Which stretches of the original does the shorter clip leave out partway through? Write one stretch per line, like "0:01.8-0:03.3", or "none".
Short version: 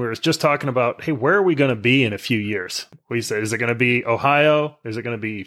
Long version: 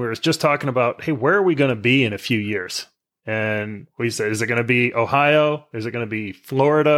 0:02.9-0:03.8